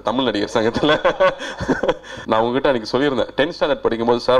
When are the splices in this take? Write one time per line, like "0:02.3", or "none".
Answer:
0:02.1